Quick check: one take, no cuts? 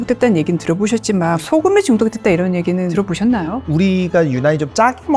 no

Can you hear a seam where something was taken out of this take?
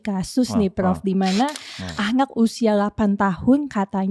no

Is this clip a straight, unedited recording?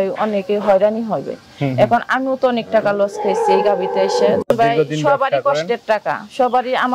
no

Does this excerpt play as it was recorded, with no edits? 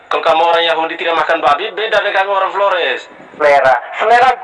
no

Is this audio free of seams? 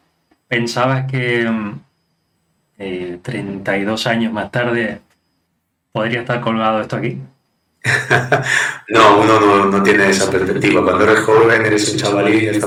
yes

